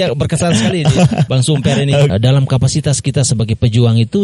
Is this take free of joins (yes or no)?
no